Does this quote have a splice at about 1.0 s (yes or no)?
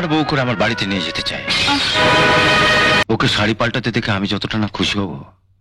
no